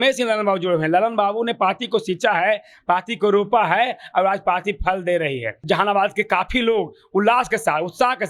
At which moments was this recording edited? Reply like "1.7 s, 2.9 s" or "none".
5.6 s

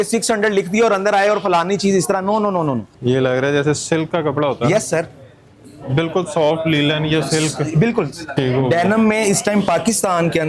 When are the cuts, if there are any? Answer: 2.9 s, 8.3 s

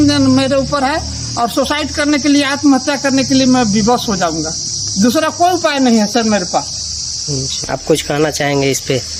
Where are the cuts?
none

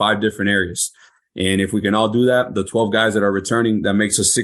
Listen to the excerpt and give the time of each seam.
none

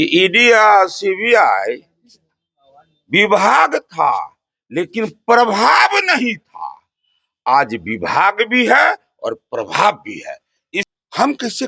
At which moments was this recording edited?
10.8 s

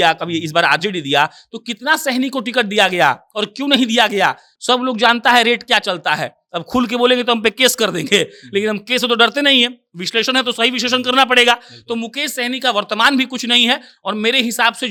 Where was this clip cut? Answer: none

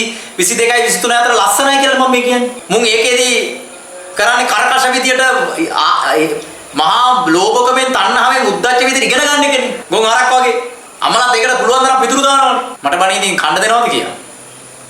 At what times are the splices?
2.6 s, 9.8 s, 10.8 s, 12.7 s

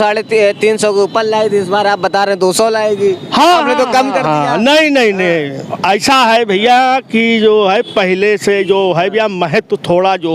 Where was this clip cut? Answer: none

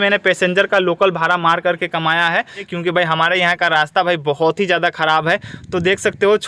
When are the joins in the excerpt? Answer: 2.7 s

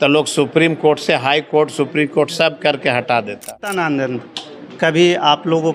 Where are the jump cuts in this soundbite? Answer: 3.7 s

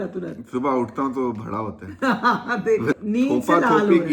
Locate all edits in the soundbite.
3.0 s

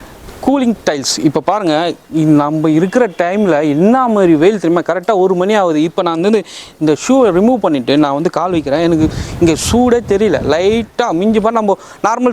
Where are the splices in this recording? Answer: none

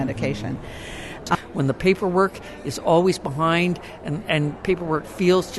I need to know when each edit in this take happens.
1.4 s

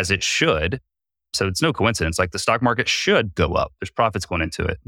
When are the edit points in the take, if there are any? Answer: 1.4 s

